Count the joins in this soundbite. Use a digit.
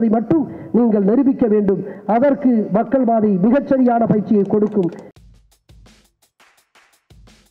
0